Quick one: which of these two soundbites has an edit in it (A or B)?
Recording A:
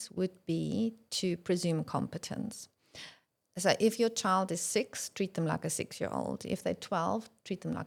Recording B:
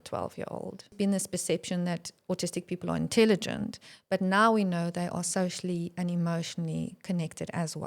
B